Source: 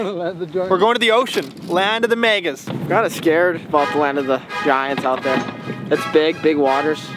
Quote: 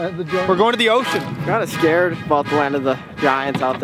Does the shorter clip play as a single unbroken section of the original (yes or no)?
no